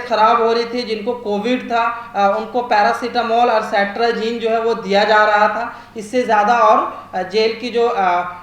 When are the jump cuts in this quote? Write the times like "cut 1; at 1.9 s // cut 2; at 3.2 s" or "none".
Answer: none